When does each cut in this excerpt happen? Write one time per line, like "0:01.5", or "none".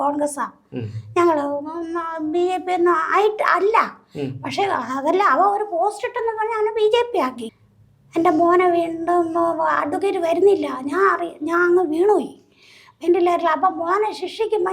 0:07.4